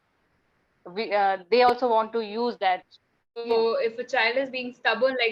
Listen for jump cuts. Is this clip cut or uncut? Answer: cut